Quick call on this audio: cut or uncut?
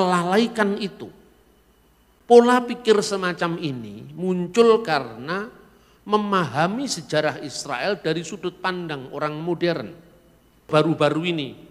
cut